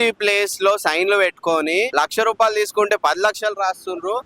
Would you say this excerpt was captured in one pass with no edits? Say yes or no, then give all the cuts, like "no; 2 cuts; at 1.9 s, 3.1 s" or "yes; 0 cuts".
no; 1 cut; at 1.9 s